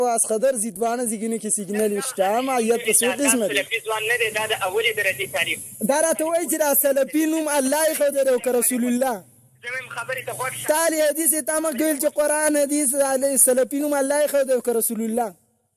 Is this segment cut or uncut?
cut